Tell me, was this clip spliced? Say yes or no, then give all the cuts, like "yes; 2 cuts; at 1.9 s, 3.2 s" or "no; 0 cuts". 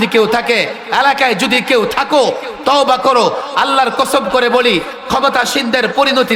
no; 0 cuts